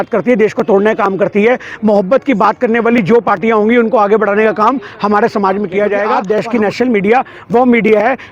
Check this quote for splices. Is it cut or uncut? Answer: cut